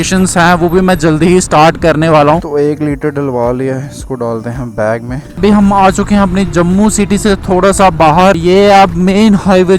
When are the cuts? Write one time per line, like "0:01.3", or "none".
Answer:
0:02.5
0:05.3
0:08.4